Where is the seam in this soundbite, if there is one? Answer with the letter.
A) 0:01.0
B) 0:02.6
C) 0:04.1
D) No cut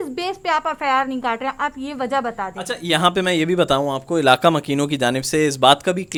D